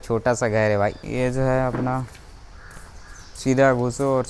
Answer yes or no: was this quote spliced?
yes